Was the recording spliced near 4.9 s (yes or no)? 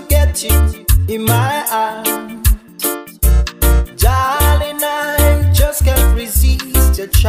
no